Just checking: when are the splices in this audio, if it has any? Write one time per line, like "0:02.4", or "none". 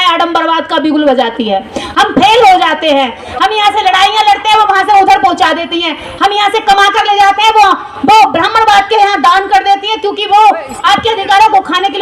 none